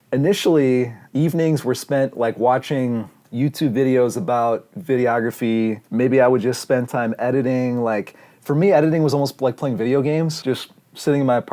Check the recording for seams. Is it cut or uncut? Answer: cut